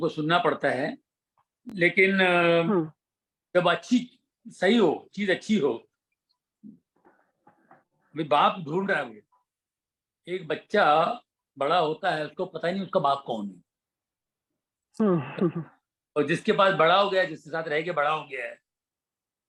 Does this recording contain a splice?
no; 0 cuts

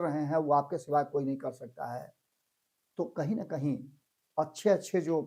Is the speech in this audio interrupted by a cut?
no; 0 cuts

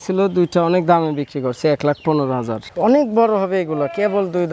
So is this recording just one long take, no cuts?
no; 1 cut; at 2.6 s

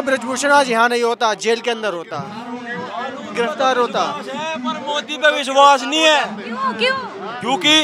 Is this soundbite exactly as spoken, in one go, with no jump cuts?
yes; 0 cuts

